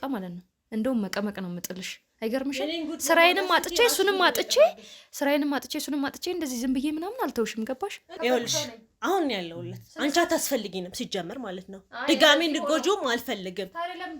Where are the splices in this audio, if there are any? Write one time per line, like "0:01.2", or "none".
0:08.1